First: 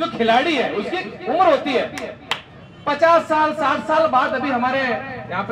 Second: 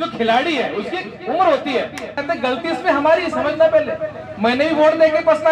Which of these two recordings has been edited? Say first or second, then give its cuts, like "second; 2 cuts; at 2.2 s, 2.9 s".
second; 1 cut; at 2.2 s